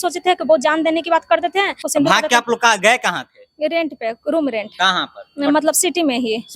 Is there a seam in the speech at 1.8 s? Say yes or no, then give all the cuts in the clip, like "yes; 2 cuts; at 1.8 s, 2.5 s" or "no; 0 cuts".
yes; 1 cut; at 1.8 s